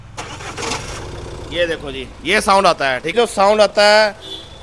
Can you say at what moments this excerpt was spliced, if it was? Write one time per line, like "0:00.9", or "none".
0:03.1